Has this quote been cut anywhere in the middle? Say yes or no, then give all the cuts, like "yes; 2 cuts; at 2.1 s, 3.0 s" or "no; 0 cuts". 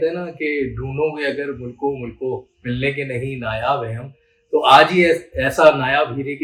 no; 0 cuts